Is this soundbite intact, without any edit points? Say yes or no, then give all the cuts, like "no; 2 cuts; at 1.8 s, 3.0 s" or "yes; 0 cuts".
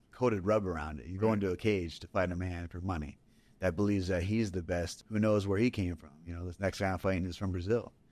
no; 1 cut; at 5.0 s